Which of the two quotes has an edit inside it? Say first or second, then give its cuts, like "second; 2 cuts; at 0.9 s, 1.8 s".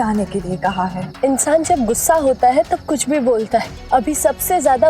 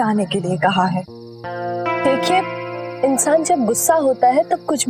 first; 2 cuts; at 1.0 s, 3.7 s